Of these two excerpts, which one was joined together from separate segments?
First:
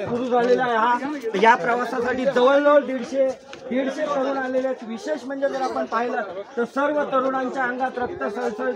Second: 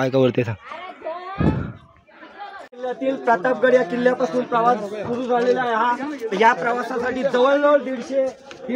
second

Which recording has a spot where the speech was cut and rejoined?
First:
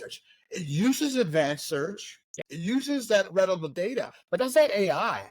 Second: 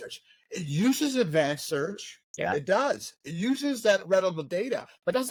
first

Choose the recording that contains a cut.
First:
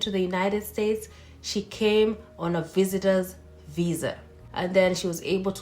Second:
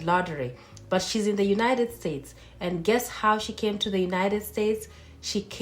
first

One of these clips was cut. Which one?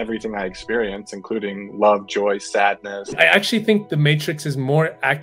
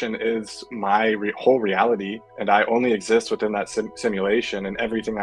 first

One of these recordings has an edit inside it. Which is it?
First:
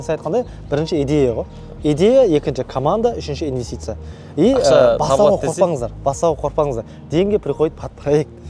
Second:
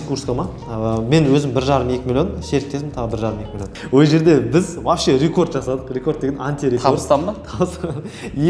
second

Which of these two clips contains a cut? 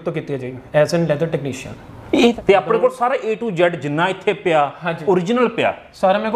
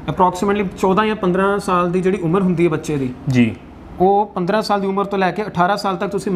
first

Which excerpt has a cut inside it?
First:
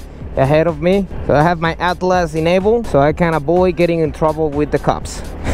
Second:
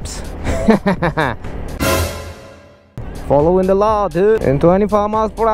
second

